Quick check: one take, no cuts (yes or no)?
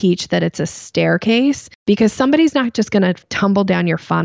no